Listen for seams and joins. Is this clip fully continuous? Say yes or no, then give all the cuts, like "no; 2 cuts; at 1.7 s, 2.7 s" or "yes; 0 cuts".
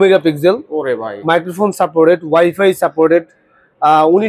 yes; 0 cuts